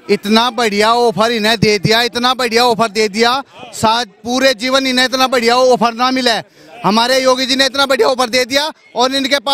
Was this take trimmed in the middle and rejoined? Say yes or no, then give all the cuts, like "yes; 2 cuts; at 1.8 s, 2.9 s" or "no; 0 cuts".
no; 0 cuts